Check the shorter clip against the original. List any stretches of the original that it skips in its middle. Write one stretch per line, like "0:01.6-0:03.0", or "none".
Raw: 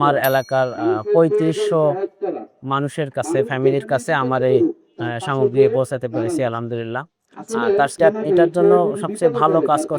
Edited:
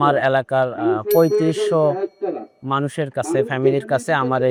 none